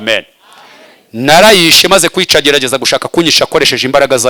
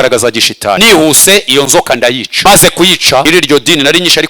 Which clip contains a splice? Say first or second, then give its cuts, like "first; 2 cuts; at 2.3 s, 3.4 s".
second; 3 cuts; at 0.8 s, 2.3 s, 3.2 s